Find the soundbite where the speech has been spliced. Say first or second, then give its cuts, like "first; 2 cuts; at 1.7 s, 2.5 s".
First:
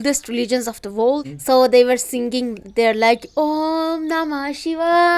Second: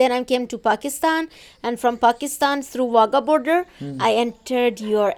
first; 1 cut; at 1.3 s